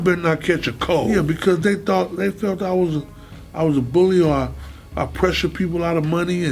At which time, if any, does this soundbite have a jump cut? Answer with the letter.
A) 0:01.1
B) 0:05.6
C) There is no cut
A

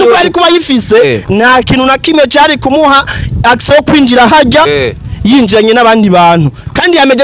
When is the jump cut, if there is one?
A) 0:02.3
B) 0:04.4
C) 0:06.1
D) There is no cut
D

